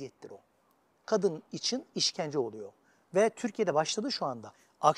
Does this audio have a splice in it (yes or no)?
no